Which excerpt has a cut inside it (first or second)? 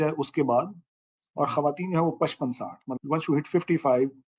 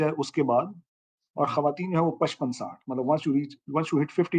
first